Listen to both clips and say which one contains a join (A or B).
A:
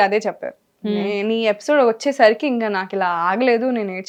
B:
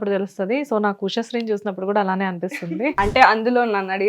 B